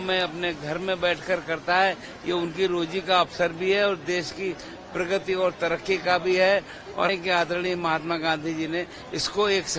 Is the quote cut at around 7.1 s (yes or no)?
yes